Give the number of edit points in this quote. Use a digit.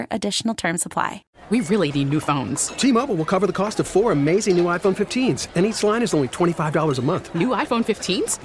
1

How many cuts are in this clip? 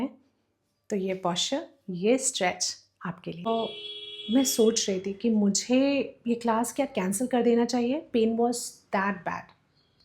1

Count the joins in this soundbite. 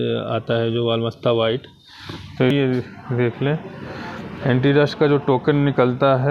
1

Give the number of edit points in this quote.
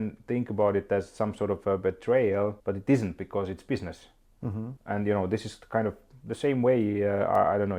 0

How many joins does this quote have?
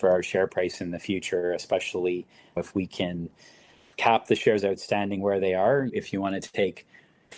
1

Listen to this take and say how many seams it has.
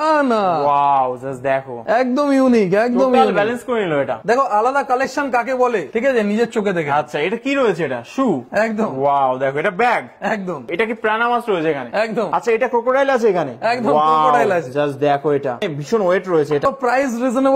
5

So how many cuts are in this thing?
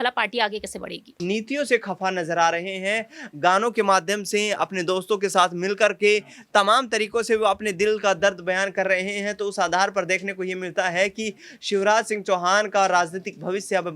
1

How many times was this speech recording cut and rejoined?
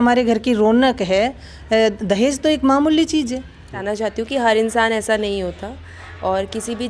1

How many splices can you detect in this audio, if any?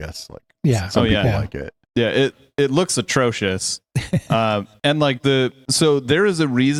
0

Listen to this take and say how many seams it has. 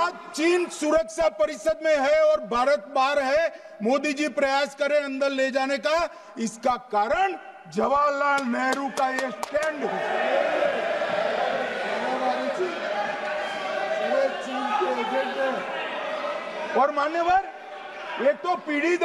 0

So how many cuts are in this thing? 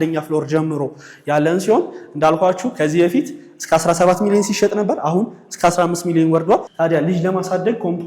1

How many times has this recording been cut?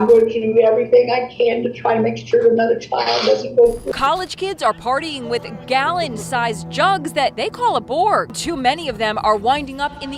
2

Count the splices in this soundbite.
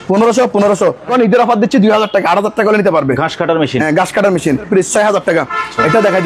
2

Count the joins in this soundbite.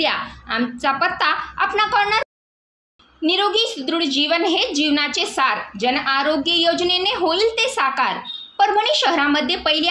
1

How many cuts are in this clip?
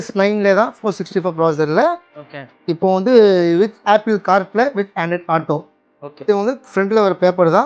1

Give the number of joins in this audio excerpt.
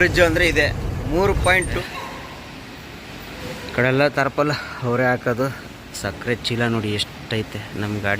1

